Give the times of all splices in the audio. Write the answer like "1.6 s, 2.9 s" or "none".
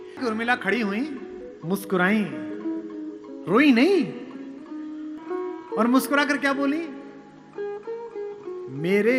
5.2 s